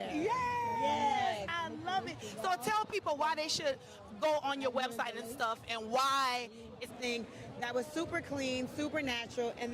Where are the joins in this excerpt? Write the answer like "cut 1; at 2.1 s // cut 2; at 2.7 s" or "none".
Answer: cut 1; at 6.9 s